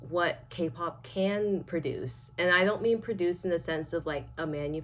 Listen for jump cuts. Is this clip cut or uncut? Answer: uncut